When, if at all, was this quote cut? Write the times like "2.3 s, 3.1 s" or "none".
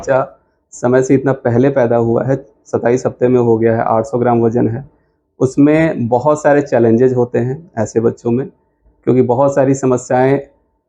none